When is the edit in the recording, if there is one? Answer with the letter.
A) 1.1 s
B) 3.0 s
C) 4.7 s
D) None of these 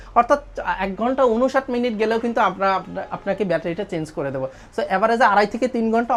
D